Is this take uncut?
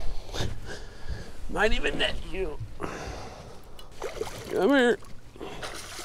no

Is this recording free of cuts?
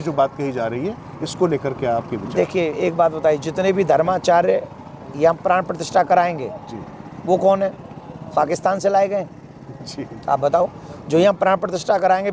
yes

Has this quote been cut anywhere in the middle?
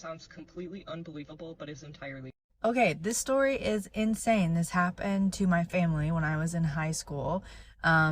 yes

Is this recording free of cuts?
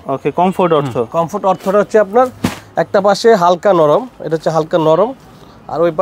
yes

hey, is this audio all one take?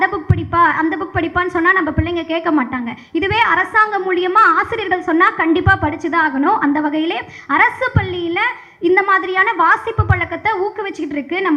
yes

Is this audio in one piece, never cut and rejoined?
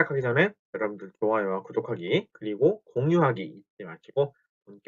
no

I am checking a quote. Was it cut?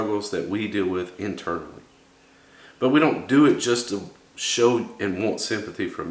no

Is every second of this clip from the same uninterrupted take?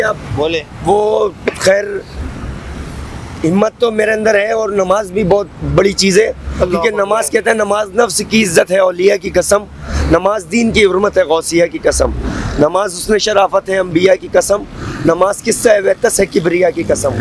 yes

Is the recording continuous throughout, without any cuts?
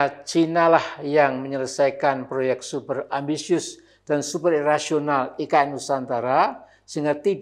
yes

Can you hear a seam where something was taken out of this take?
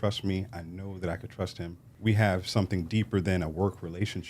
yes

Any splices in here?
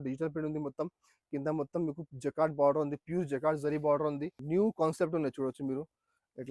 yes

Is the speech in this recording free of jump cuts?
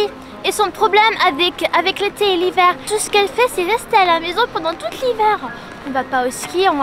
no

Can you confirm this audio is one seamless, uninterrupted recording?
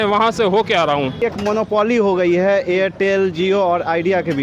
no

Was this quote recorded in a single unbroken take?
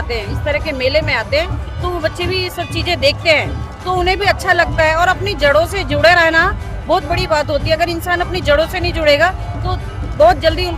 yes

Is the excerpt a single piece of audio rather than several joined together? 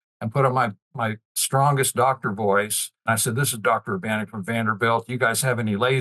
no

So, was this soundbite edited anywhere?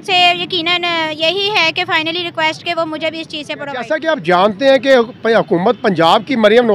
yes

